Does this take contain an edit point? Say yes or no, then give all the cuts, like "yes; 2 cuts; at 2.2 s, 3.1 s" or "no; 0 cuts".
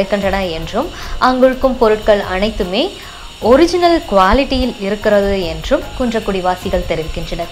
no; 0 cuts